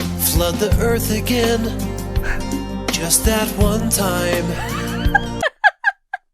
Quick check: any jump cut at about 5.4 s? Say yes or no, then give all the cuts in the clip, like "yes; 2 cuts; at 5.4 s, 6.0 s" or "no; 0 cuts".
yes; 1 cut; at 5.4 s